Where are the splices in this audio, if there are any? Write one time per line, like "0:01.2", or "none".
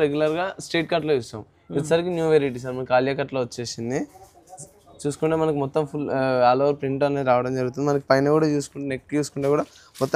none